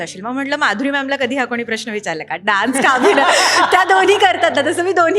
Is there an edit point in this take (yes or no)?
no